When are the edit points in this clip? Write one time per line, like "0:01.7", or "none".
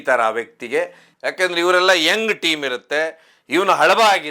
0:01.1